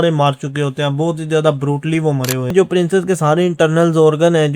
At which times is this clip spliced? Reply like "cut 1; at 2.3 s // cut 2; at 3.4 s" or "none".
cut 1; at 2.5 s